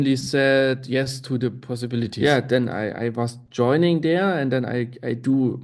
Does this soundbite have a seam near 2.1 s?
yes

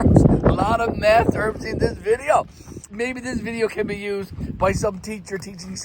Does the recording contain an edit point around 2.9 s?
yes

